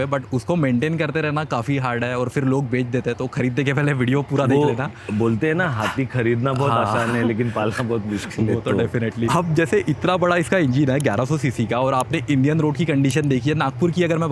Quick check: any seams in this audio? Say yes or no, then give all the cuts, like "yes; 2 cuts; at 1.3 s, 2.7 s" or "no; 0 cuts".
no; 0 cuts